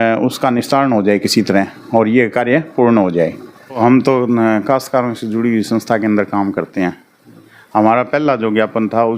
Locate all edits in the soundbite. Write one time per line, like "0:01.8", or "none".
0:03.8